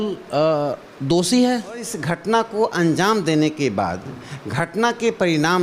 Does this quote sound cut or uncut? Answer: cut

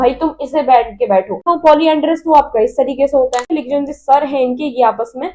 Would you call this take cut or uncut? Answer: cut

